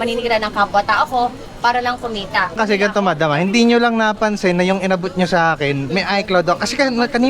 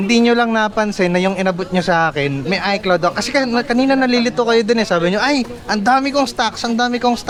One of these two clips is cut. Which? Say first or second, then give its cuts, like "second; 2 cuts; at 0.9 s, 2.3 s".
first; 1 cut; at 2.5 s